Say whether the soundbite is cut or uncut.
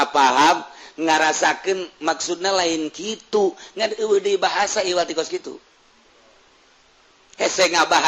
uncut